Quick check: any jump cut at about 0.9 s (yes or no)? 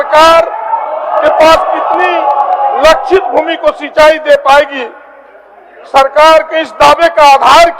no